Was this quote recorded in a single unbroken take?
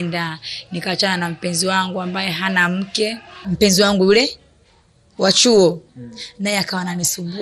no; 1 cut; at 3.5 s

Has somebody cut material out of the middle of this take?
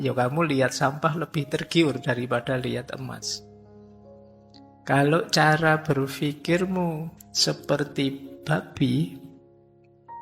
yes; 1 cut; at 7.1 s

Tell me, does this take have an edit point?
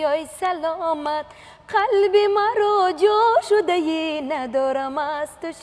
no; 0 cuts

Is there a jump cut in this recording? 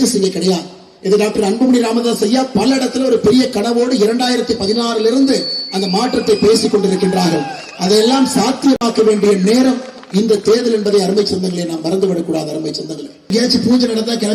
yes; 1 cut; at 13.3 s

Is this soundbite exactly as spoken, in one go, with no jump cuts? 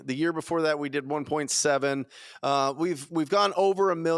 yes; 0 cuts

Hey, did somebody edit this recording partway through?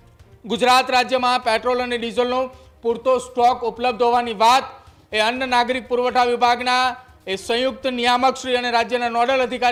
no; 0 cuts

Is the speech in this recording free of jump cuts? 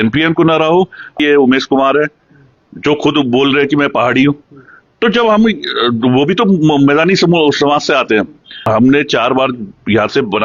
no; 2 cuts; at 1.2 s, 8.7 s

